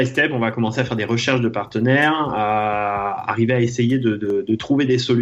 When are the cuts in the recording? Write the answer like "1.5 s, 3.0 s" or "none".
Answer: none